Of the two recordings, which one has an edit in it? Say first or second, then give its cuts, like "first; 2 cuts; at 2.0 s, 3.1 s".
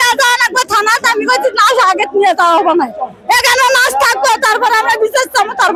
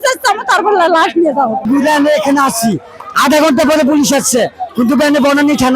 second; 1 cut; at 1.6 s